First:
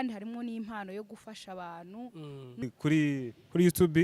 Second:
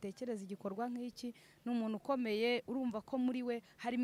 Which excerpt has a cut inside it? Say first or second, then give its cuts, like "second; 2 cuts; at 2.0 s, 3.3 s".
first; 1 cut; at 2.7 s